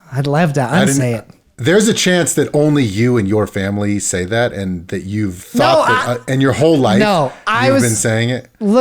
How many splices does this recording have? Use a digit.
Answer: 2